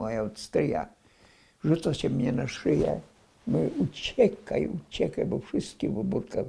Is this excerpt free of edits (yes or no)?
yes